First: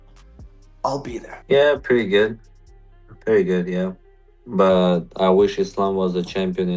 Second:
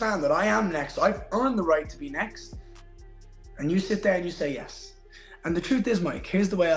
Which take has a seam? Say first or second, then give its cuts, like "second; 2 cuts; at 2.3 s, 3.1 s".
first; 1 cut; at 1.3 s